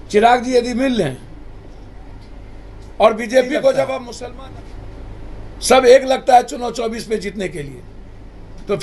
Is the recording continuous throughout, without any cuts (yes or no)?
no